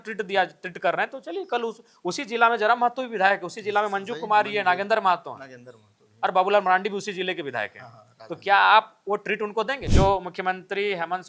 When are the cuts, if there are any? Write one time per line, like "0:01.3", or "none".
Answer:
0:09.8